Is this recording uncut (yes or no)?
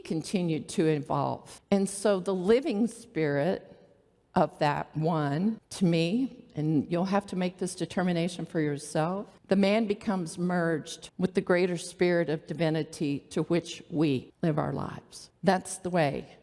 no